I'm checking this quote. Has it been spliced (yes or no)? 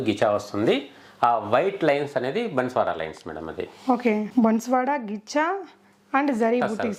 no